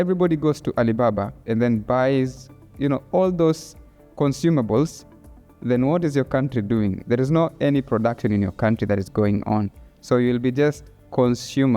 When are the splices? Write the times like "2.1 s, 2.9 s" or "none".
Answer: 2.7 s